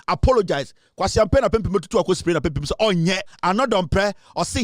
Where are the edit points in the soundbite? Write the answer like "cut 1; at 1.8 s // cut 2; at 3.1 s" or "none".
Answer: cut 1; at 3.3 s